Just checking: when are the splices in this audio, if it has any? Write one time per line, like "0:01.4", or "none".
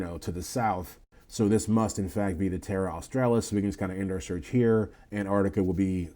0:05.0